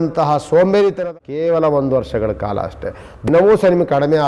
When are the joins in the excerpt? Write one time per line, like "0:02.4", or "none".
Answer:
0:01.0
0:03.3